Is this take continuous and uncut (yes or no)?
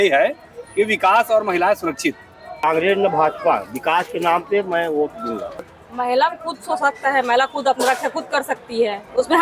no